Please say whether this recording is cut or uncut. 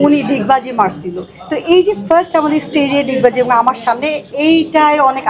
uncut